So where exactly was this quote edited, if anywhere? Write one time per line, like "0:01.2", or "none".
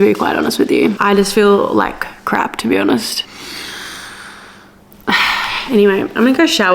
none